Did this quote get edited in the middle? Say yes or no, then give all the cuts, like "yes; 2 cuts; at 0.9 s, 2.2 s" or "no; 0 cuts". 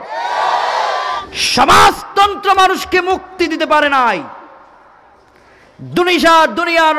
yes; 1 cut; at 1.3 s